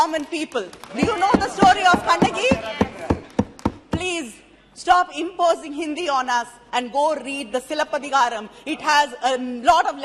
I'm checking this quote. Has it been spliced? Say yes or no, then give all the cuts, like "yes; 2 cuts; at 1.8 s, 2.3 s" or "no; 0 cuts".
no; 0 cuts